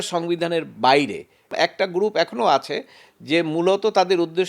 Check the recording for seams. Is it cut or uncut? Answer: cut